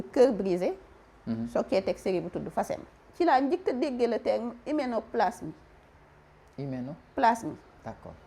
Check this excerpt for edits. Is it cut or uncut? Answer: cut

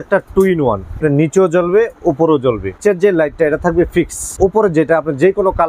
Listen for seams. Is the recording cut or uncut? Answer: cut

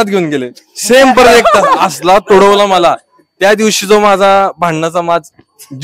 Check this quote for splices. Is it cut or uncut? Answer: uncut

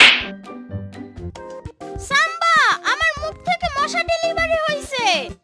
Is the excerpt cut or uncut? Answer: cut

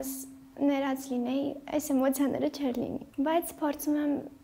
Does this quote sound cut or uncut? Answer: cut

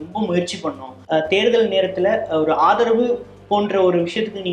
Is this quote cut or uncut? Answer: cut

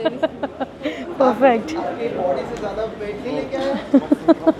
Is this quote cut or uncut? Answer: uncut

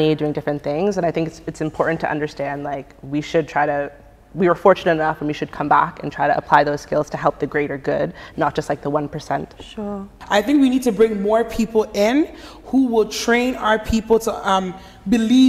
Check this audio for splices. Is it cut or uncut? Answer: uncut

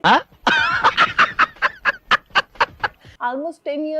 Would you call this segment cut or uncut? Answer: cut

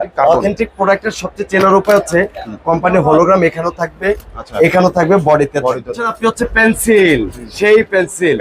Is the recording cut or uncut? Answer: cut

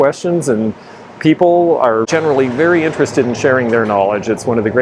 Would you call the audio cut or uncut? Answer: cut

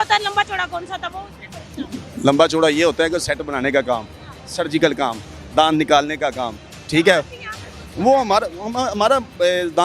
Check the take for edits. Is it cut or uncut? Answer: uncut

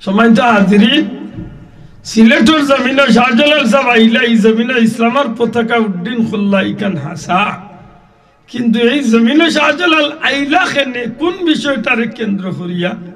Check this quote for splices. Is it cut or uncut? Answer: uncut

